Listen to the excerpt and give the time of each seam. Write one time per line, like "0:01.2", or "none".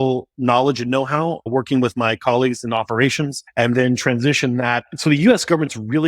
0:01.5
0:03.4
0:04.9

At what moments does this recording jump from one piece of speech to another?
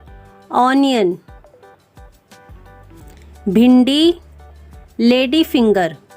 0:01.2
0:02.7

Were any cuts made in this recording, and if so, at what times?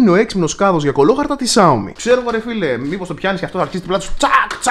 0:01.9

